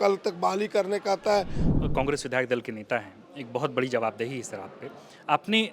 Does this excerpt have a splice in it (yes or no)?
yes